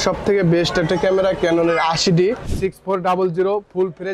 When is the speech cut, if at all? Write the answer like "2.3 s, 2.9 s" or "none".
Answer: 2.4 s